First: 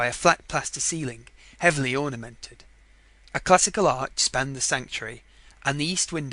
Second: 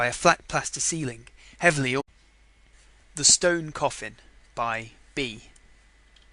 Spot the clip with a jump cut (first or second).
first